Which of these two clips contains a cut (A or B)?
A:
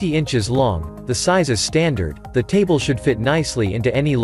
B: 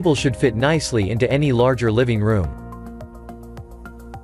B